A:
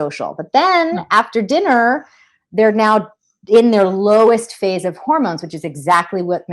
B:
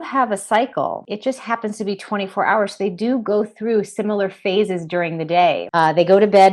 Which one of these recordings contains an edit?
B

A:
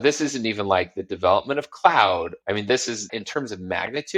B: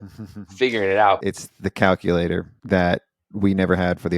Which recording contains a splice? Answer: B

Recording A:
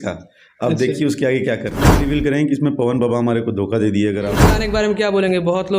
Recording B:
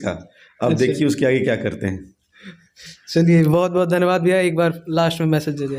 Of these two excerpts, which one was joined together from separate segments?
A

